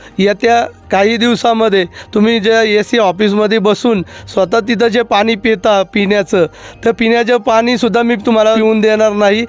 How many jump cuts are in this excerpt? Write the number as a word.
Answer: one